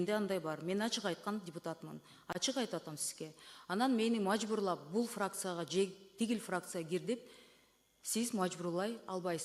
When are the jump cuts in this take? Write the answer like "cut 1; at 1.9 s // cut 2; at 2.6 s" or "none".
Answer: none